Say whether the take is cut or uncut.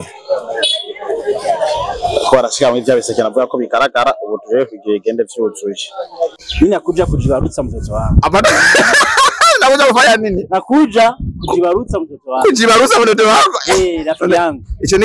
cut